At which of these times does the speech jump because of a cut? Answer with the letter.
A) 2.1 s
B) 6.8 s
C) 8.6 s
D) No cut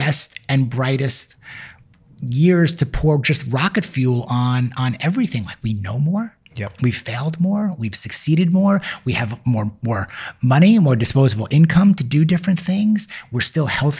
D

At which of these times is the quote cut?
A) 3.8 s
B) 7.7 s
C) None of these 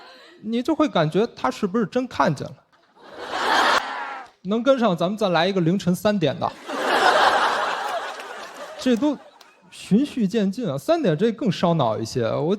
A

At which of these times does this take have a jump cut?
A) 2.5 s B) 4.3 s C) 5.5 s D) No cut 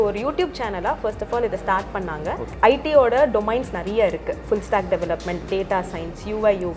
A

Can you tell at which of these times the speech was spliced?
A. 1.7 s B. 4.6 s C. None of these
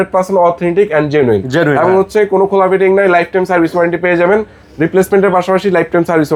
C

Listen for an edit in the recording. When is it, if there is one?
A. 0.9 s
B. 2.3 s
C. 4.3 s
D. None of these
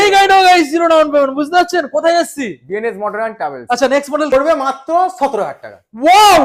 C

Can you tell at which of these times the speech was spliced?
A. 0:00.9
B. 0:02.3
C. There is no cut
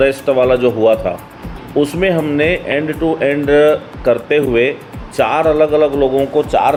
C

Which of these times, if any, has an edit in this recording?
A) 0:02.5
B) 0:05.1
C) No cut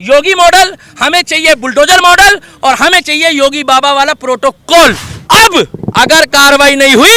B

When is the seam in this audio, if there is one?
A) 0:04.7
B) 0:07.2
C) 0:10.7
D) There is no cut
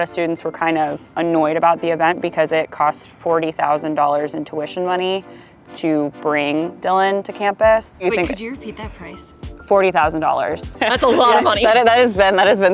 C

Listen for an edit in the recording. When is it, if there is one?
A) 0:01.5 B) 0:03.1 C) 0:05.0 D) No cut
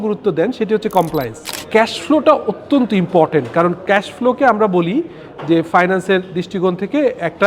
A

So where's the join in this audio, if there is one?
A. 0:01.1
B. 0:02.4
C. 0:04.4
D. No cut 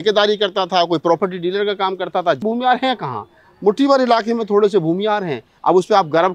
B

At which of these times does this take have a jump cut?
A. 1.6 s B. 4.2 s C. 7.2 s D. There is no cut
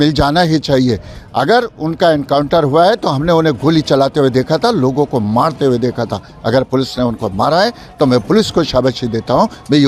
D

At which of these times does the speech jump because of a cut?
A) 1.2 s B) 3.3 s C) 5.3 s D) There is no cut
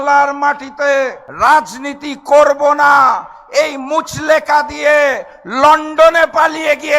A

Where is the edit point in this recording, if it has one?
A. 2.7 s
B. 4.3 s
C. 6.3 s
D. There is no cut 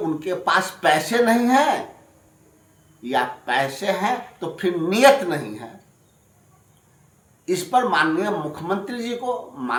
D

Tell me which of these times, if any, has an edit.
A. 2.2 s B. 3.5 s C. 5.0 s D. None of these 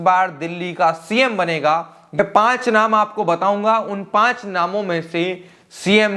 A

